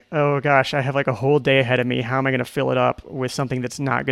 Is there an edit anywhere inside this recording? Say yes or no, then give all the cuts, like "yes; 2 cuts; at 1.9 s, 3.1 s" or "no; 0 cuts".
no; 0 cuts